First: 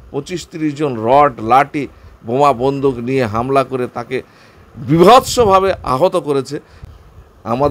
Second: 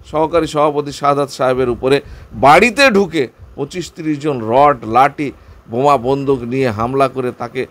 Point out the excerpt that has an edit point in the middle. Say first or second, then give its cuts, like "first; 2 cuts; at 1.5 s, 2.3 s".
first; 1 cut; at 6.8 s